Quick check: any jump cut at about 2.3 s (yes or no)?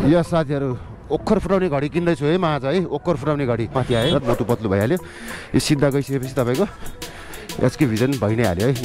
no